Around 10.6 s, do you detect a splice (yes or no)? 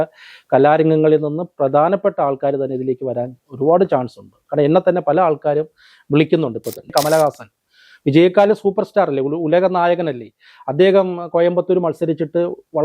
no